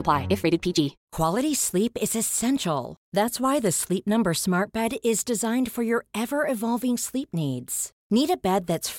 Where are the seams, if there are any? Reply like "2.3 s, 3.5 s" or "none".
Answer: 1.0 s